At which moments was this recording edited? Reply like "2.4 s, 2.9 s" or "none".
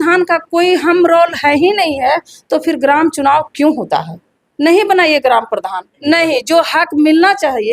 5.9 s